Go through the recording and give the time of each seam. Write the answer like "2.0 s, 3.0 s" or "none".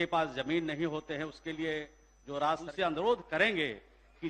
2.7 s